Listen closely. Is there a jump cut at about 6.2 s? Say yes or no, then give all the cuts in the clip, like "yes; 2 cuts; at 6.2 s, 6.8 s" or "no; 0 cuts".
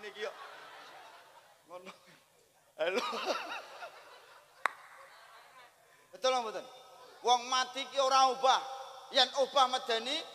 yes; 1 cut; at 6.2 s